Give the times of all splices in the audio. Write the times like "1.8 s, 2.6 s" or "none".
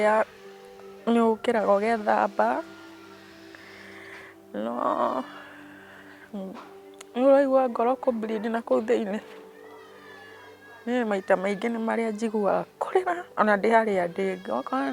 none